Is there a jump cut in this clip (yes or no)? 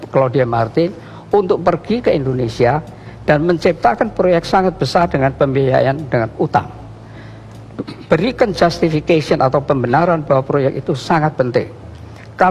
no